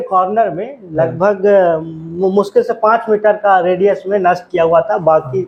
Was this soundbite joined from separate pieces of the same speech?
no; 0 cuts

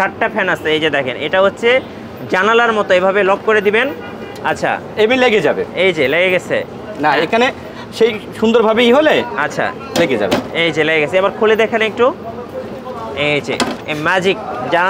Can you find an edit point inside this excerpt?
no; 0 cuts

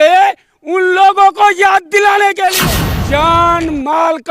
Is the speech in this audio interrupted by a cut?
yes; 1 cut; at 2.6 s

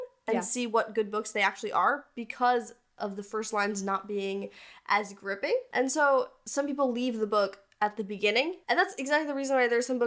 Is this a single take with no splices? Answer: no; 2 cuts; at 5.7 s, 8.6 s

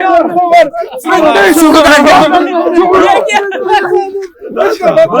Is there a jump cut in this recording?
no; 0 cuts

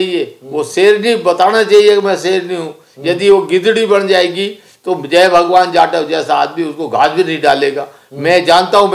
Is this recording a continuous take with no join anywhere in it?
yes; 0 cuts

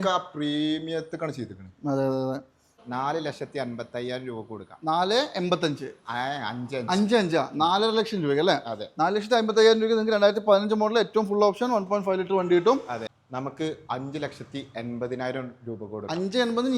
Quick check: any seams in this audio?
yes; 2 cuts; at 2.8 s, 13.0 s

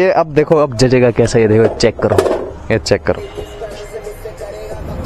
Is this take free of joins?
no; 1 cut; at 3.0 s

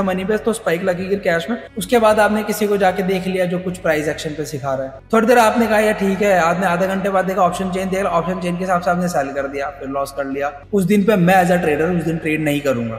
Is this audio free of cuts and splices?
no; 3 cuts; at 1.7 s, 5.0 s, 10.6 s

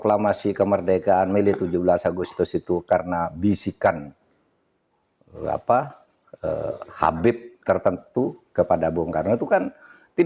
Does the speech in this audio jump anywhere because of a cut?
no; 0 cuts

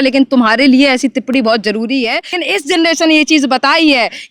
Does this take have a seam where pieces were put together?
yes; 1 cut; at 2.4 s

